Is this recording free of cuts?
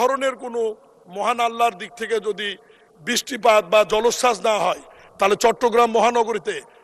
yes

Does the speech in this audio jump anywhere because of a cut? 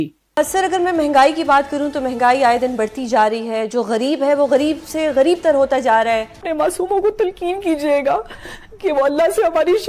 yes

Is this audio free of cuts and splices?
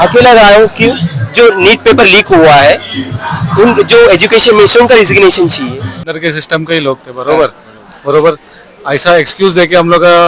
no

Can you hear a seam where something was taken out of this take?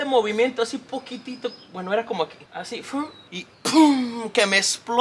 no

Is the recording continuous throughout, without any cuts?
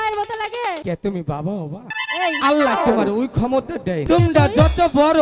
no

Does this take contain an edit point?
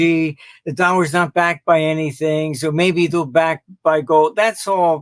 no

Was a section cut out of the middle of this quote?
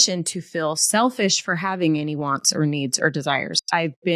no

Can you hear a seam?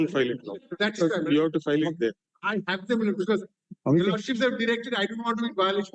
no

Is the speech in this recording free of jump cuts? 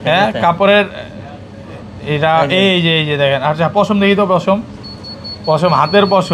yes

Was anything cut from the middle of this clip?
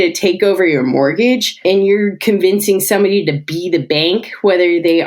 yes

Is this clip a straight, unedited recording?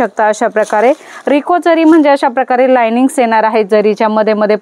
yes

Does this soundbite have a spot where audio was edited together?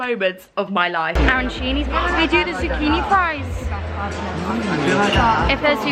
no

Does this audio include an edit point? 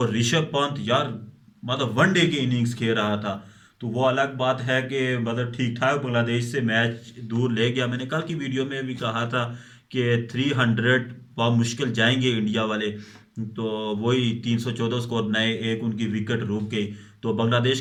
no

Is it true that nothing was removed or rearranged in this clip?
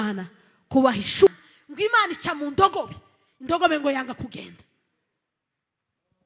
no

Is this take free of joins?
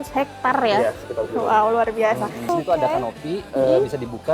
no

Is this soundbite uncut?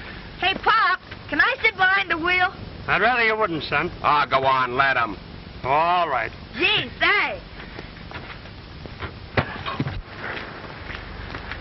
no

